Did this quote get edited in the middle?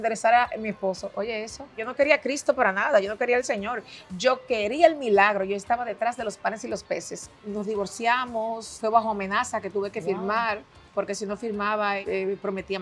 yes; 5 cuts; at 1.8 s, 7.2 s, 8.8 s, 10.7 s, 12.0 s

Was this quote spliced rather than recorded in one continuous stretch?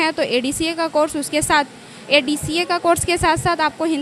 no; 0 cuts

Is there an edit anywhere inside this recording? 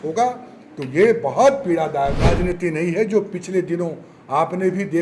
yes; 1 cut; at 2.4 s

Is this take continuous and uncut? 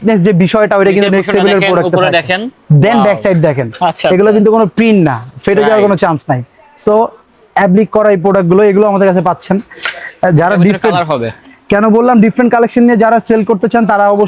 yes; 0 cuts

